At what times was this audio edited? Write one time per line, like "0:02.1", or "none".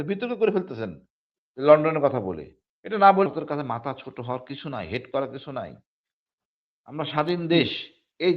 0:03.3